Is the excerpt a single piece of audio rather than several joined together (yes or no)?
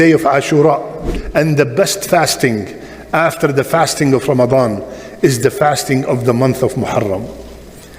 no